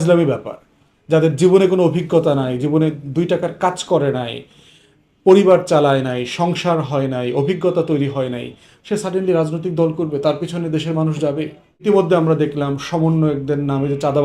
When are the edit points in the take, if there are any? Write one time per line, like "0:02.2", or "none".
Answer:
0:11.8